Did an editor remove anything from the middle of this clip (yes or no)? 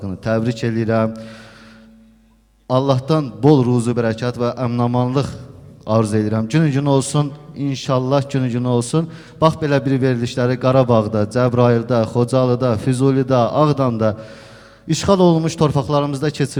no